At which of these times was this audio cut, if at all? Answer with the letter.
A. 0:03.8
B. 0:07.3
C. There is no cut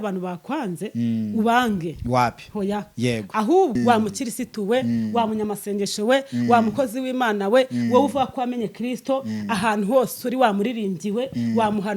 A